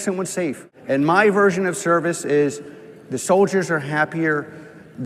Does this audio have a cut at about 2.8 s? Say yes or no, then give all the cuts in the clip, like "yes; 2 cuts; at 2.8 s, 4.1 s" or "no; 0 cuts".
no; 0 cuts